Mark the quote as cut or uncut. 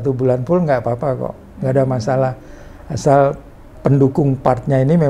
uncut